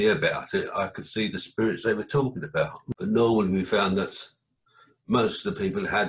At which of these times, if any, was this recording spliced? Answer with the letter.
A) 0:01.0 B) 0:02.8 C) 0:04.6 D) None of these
B